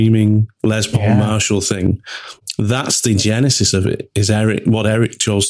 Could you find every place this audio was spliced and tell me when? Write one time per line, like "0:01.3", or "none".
none